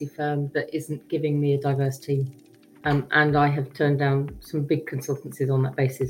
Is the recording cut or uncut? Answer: cut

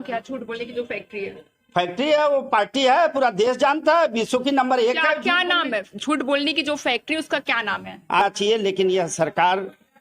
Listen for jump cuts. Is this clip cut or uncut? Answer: cut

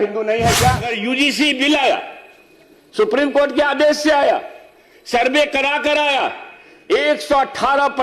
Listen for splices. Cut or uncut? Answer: cut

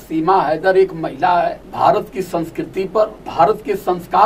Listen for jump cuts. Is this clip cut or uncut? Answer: cut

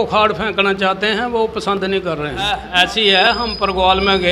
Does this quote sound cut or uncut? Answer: cut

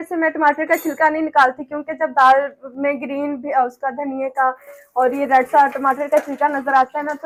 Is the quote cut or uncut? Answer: uncut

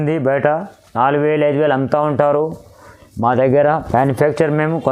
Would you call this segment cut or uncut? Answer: uncut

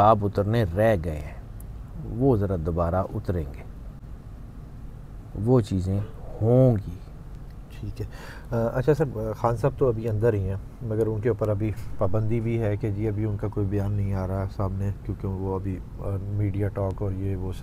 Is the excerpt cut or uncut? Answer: uncut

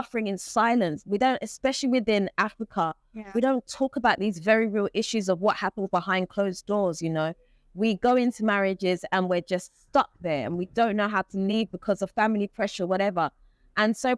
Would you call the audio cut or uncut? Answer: uncut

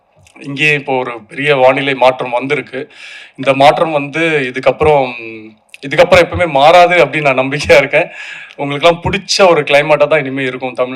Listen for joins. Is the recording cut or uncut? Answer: uncut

